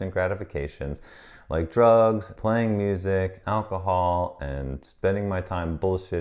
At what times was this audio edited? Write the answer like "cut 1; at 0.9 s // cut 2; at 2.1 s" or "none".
cut 1; at 2.3 s // cut 2; at 3.4 s